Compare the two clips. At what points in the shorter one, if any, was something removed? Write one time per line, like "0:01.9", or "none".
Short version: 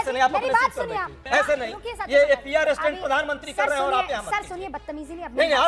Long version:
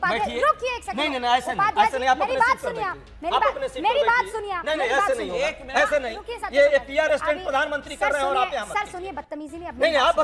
0:01.2